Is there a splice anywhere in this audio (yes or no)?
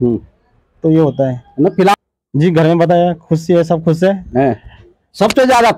yes